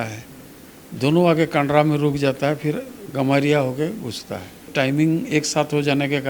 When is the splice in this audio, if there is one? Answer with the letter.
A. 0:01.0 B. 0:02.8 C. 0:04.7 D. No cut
C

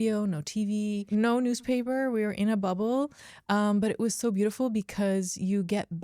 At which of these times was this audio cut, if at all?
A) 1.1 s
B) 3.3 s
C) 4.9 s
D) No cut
A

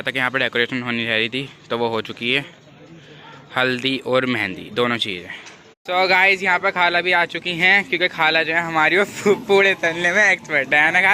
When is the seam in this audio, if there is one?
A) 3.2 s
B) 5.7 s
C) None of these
B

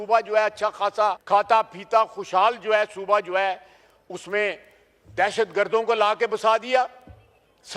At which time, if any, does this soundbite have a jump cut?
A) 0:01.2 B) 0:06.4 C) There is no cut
A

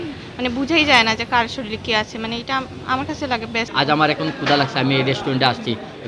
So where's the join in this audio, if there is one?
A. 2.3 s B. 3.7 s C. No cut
B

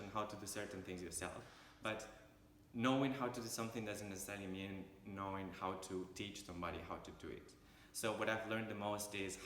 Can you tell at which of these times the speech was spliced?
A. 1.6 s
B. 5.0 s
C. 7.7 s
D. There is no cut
A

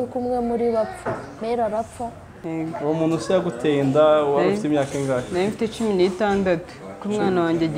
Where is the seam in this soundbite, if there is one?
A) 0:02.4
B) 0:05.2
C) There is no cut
A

